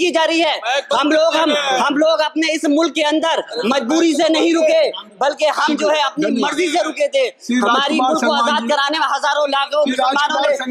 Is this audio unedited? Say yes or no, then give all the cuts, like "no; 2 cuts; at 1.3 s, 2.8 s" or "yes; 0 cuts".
yes; 0 cuts